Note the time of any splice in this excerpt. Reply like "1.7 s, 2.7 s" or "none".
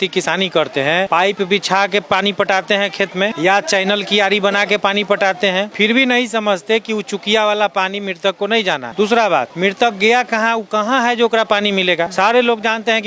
1.1 s, 3.3 s, 5.7 s, 8.9 s, 9.5 s, 12.1 s